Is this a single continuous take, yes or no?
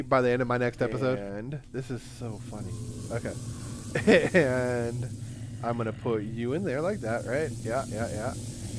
no